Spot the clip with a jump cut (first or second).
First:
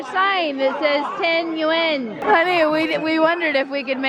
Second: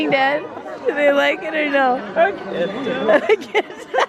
first